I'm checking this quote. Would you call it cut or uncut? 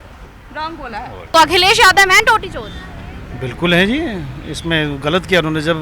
cut